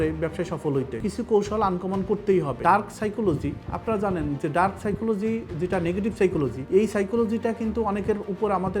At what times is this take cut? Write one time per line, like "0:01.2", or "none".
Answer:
0:01.0
0:06.6